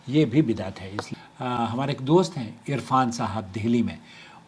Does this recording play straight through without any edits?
no; 1 cut; at 1.0 s

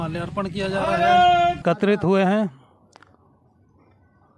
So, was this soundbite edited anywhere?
yes; 1 cut; at 1.6 s

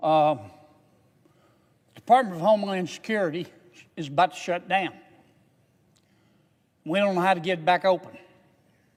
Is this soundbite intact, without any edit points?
yes; 0 cuts

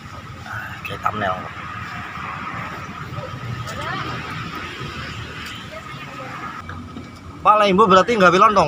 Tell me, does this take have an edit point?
yes; 1 cut; at 6.6 s

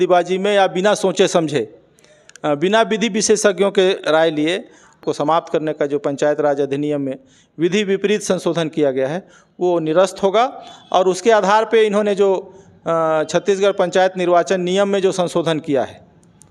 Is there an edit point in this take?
yes; 1 cut; at 4.9 s

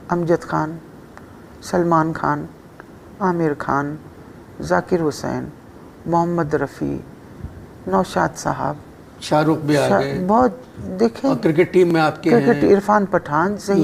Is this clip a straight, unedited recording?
yes; 0 cuts

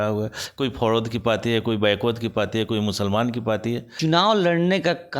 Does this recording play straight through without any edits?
no; 1 cut; at 3.9 s

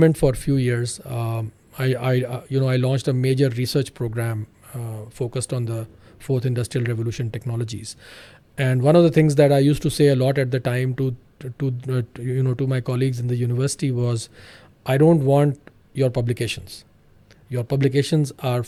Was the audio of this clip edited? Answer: no; 0 cuts

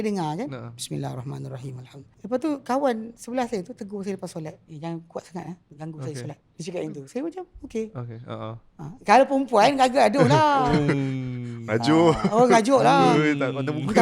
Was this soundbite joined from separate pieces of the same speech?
yes; 4 cuts; at 2.1 s, 4.6 s, 5.7 s, 6.5 s

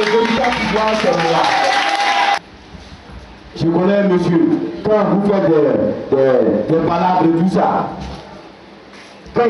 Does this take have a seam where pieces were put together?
yes; 1 cut; at 2.4 s

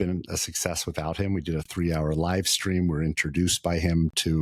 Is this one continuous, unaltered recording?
yes; 0 cuts

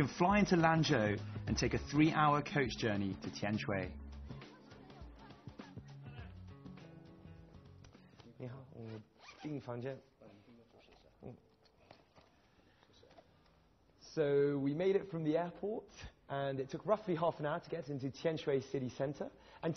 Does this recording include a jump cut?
yes; 1 cut; at 13.4 s

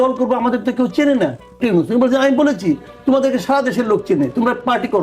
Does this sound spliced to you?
yes; 1 cut; at 1.6 s

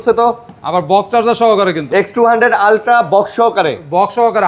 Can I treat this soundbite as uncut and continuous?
no; 1 cut; at 1.8 s

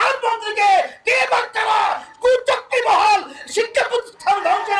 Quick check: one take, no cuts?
yes; 0 cuts

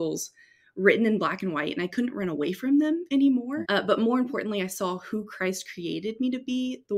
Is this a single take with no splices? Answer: no; 1 cut; at 3.6 s

